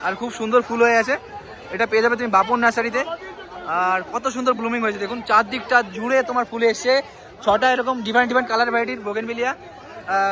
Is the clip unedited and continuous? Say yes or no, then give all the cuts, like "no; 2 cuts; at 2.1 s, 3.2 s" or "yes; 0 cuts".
yes; 0 cuts